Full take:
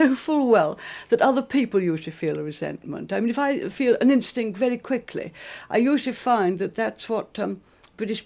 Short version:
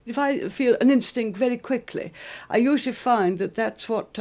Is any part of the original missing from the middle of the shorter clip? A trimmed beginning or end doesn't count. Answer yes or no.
no